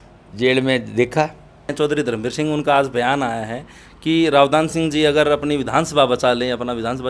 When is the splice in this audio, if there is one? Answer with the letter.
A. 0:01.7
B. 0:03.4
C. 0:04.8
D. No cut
A